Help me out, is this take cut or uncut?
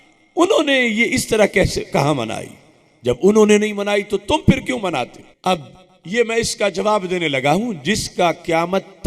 cut